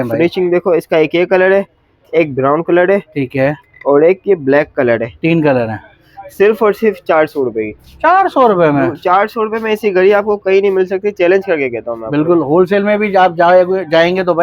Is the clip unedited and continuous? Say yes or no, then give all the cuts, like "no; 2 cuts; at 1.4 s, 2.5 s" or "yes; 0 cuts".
yes; 0 cuts